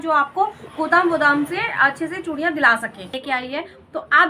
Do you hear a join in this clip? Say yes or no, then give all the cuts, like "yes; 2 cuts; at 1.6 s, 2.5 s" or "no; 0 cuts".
yes; 1 cut; at 3.2 s